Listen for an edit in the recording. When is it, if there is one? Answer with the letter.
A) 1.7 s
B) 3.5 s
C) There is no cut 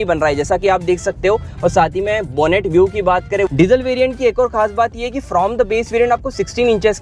B